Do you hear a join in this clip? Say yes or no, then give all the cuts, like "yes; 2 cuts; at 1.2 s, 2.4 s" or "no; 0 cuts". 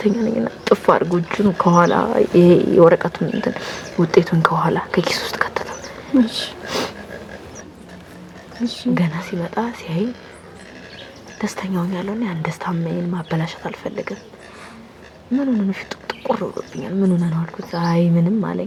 no; 0 cuts